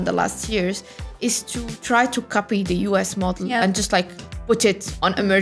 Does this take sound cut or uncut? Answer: uncut